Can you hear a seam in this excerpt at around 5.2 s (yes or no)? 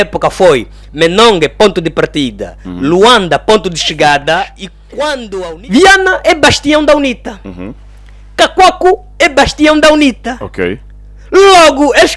yes